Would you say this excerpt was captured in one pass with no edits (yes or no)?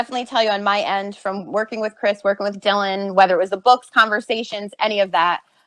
yes